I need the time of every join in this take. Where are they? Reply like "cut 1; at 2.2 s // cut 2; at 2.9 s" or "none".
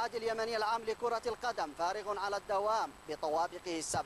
none

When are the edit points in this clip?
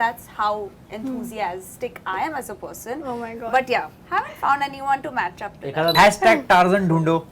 cut 1; at 5.9 s

